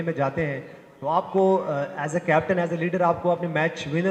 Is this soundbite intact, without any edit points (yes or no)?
yes